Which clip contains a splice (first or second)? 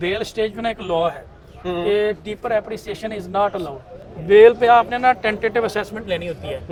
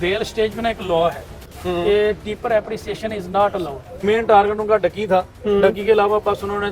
second